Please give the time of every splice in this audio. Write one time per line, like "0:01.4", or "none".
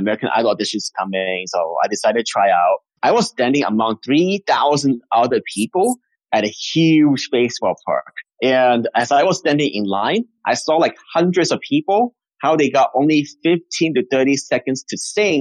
0:03.0